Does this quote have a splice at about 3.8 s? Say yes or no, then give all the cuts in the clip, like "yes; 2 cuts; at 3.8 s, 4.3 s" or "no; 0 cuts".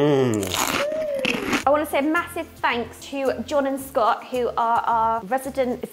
no; 1 cut; at 1.6 s